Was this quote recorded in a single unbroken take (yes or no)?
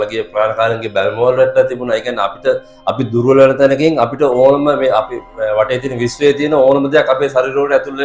yes